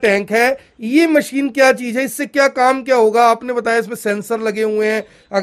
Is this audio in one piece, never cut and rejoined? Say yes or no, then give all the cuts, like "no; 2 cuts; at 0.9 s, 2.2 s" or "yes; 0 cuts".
yes; 0 cuts